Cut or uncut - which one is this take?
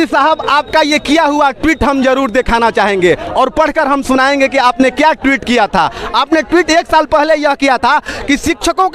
uncut